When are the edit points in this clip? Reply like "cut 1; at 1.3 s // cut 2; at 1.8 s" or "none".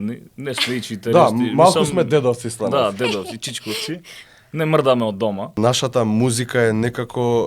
cut 1; at 5.6 s